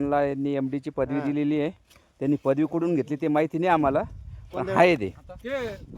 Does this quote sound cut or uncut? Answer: uncut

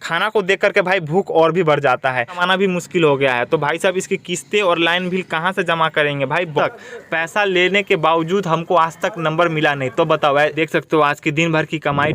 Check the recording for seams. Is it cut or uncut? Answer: cut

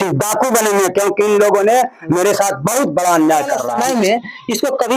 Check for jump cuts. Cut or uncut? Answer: cut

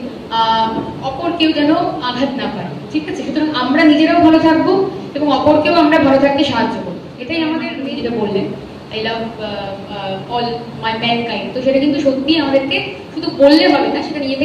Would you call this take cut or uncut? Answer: cut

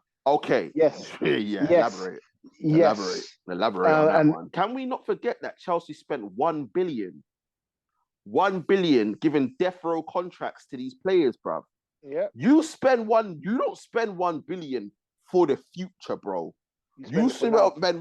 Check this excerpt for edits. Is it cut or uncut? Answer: cut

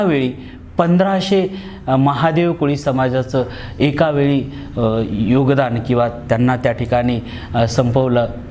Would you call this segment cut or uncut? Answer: uncut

